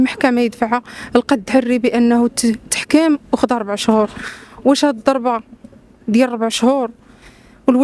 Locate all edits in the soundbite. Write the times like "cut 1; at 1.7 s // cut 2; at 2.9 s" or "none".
none